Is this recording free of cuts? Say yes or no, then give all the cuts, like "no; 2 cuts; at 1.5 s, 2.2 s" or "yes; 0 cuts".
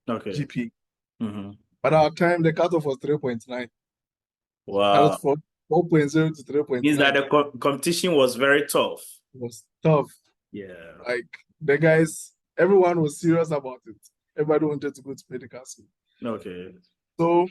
yes; 0 cuts